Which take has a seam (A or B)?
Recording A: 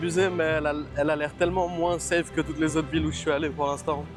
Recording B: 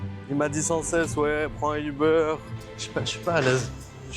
B